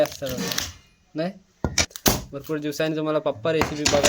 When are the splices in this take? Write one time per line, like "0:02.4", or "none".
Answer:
0:01.8